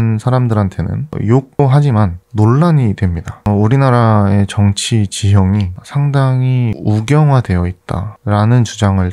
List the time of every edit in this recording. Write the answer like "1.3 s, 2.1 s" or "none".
3.3 s